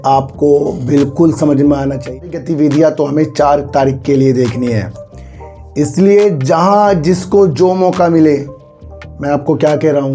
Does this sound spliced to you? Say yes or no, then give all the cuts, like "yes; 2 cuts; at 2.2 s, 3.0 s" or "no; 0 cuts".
yes; 1 cut; at 2.2 s